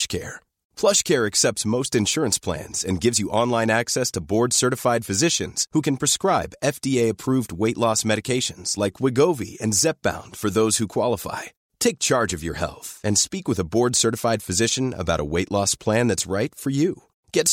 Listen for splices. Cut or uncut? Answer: uncut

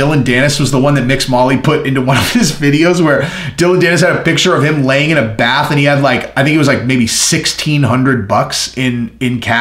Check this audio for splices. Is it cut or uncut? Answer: uncut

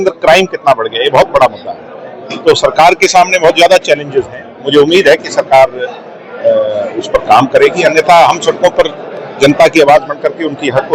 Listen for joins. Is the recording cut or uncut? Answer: uncut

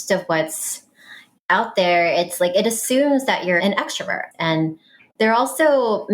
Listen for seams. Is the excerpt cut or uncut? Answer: cut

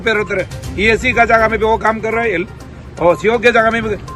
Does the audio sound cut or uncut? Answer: uncut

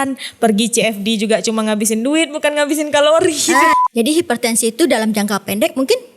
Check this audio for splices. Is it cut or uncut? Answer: cut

